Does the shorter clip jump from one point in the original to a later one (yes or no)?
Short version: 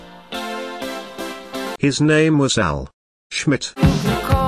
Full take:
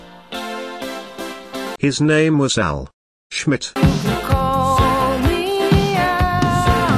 no